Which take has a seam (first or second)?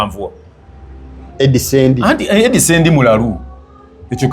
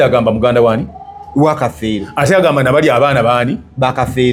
first